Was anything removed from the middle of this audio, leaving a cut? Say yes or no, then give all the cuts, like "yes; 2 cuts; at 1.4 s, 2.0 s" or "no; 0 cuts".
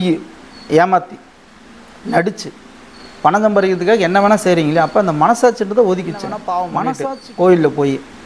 yes; 1 cut; at 6.8 s